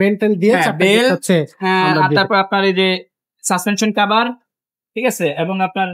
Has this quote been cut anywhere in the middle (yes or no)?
no